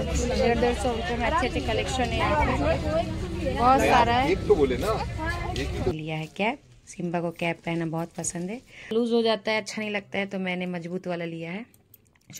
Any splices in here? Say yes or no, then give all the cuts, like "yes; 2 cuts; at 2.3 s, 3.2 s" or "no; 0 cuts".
yes; 2 cuts; at 5.9 s, 8.9 s